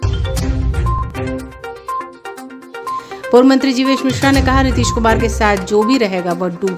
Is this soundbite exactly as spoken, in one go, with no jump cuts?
yes; 0 cuts

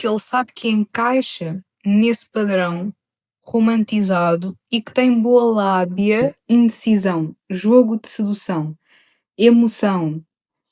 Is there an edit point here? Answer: yes; 1 cut; at 6.4 s

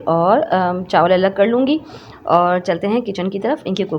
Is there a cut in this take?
no; 0 cuts

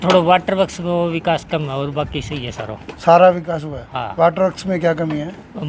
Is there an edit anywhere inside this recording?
no; 0 cuts

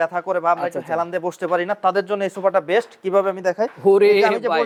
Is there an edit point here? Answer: no; 0 cuts

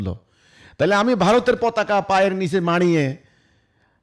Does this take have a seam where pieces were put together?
no; 0 cuts

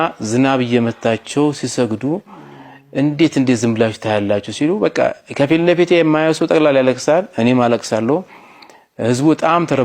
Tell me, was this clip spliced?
no; 0 cuts

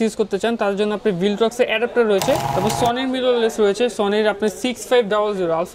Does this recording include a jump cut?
yes; 1 cut; at 2.5 s

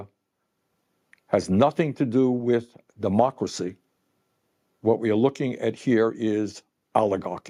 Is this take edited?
no; 0 cuts

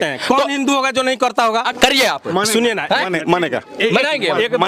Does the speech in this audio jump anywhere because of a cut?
yes; 1 cut; at 1.7 s

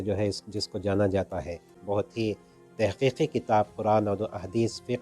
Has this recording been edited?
yes; 1 cut; at 1.8 s

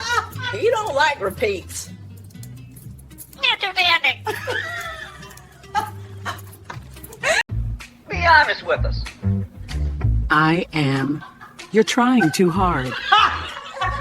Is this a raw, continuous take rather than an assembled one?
no; 1 cut; at 7.5 s

